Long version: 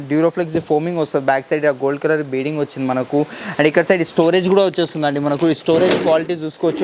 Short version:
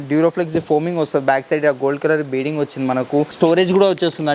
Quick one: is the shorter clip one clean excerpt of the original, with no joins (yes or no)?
no